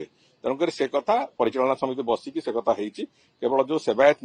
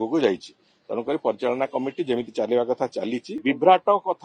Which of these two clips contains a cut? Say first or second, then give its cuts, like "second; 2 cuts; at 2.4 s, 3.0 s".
second; 1 cut; at 3.3 s